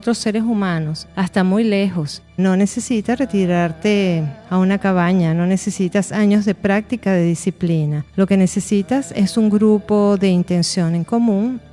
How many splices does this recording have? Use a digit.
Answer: 1